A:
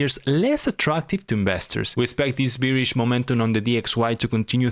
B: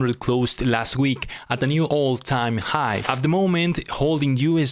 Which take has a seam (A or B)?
B